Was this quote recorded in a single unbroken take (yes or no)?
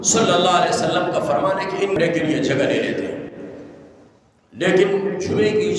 no